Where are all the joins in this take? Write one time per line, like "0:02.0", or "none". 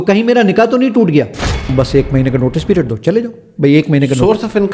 0:01.7